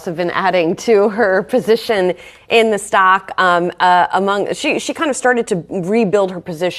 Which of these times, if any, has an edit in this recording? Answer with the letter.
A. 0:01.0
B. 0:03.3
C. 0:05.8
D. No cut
D